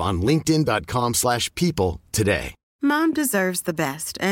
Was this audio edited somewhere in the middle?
yes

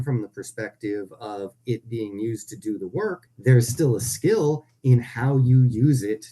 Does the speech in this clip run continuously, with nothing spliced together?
no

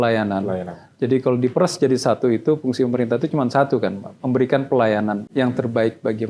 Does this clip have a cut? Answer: no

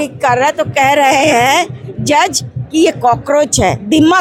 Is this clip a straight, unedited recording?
yes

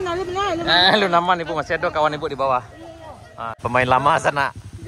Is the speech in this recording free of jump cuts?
no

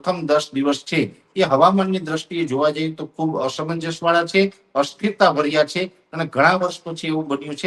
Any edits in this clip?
no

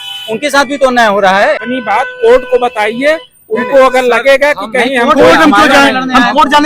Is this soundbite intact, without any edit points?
no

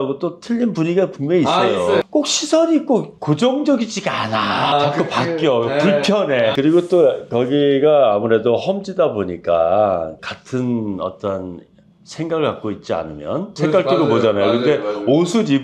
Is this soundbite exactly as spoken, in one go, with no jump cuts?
no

